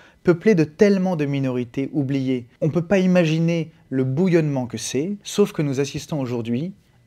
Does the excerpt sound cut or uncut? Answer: cut